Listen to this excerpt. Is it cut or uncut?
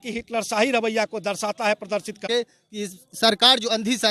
cut